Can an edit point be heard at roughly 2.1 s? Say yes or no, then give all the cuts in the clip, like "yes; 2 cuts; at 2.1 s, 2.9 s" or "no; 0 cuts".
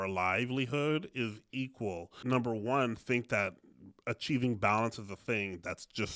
yes; 1 cut; at 2.1 s